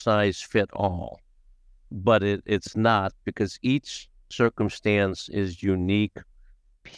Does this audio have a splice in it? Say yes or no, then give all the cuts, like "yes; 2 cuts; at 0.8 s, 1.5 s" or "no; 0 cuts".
no; 0 cuts